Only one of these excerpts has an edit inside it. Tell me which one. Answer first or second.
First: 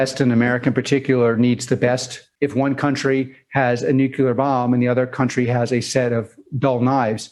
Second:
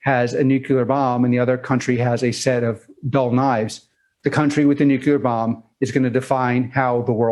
first